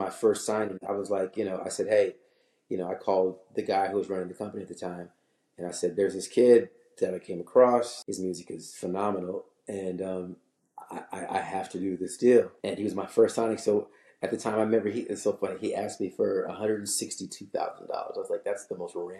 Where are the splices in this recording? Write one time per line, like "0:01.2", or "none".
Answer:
0:08.0
0:12.6